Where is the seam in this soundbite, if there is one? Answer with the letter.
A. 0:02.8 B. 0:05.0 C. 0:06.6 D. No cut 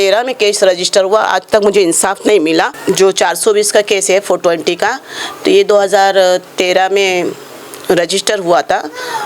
A